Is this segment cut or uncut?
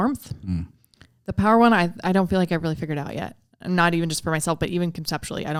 uncut